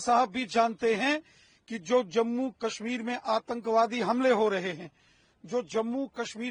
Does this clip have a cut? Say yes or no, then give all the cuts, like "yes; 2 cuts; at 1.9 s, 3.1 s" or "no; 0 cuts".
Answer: no; 0 cuts